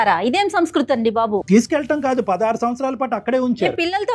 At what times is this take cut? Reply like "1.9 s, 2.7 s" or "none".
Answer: none